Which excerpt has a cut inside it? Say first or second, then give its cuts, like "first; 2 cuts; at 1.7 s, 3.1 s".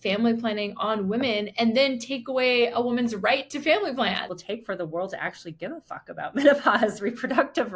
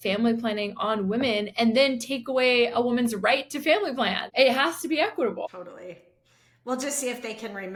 first; 1 cut; at 4.3 s